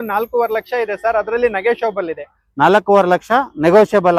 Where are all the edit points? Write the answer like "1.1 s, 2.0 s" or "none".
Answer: none